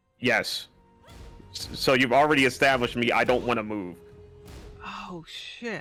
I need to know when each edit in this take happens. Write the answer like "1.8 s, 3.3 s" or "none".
none